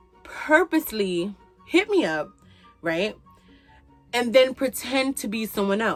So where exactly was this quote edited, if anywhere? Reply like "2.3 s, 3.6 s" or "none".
none